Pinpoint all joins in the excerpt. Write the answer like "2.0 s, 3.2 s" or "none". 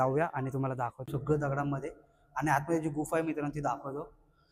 1.1 s